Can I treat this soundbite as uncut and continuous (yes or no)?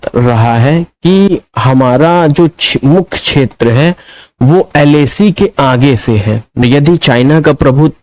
no